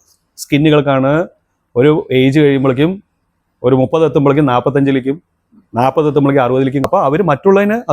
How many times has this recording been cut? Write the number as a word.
one